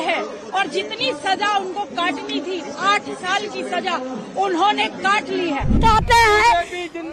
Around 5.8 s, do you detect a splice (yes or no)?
yes